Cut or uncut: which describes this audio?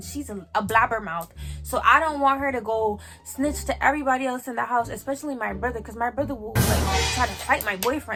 uncut